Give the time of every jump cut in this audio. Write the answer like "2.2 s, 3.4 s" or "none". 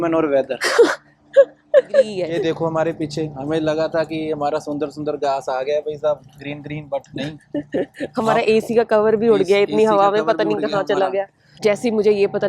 2.2 s, 11.4 s